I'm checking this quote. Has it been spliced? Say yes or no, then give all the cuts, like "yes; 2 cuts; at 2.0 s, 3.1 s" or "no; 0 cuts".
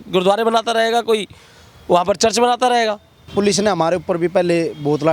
yes; 1 cut; at 3.3 s